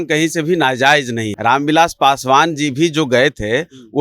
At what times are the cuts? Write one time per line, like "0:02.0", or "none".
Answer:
0:01.3

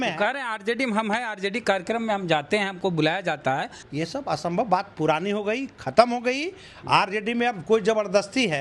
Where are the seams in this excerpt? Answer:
0:03.8

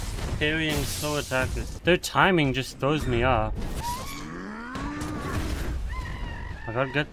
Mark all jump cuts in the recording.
0:01.7
0:03.8

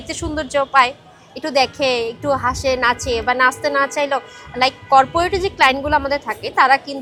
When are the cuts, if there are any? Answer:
none

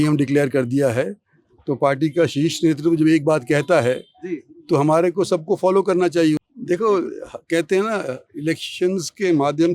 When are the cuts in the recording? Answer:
0:06.4

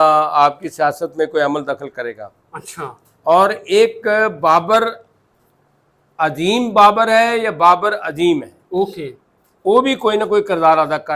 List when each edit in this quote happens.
none

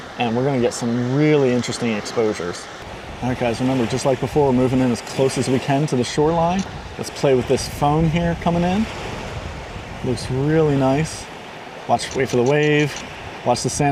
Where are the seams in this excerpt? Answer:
none

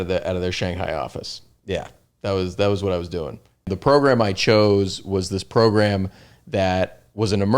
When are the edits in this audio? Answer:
0:03.7

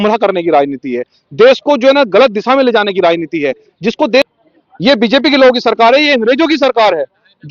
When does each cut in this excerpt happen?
0:04.3

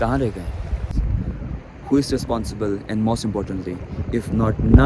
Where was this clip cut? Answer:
0:01.0

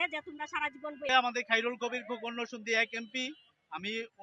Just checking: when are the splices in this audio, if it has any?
0:01.1

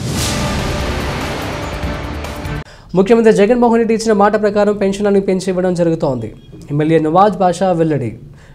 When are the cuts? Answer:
0:02.6

